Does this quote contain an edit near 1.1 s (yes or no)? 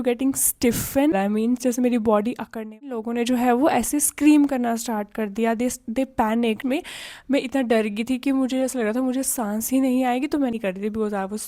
yes